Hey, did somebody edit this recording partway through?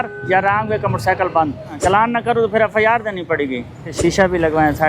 yes; 2 cuts; at 1.7 s, 3.9 s

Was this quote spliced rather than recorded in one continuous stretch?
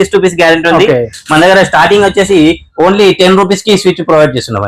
no; 0 cuts

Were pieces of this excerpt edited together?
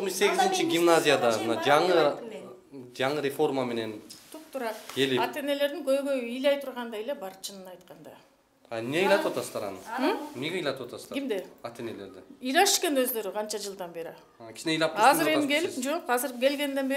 no; 0 cuts

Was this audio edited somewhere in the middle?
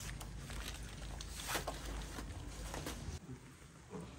yes; 1 cut; at 3.2 s

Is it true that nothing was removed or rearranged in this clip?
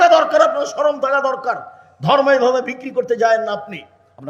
yes; 0 cuts

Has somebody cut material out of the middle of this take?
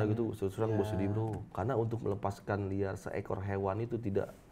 yes; 1 cut; at 1.4 s

